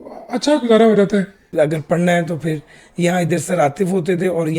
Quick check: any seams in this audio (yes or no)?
yes